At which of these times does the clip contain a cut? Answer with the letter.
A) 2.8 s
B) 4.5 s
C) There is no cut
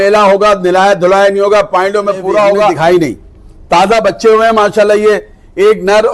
A